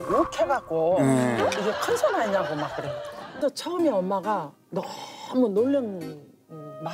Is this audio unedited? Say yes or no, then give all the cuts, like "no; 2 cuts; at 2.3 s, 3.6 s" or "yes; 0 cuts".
no; 1 cut; at 3.4 s